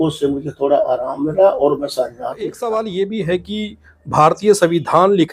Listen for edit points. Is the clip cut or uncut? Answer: cut